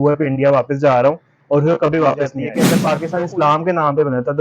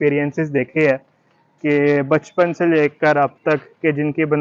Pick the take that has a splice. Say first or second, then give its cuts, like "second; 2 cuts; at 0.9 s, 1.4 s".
first; 1 cut; at 2.7 s